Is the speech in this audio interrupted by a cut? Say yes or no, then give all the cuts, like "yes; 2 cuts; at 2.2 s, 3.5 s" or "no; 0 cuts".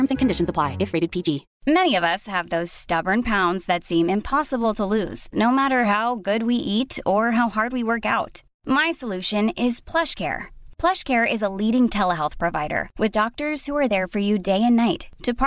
yes; 1 cut; at 1.5 s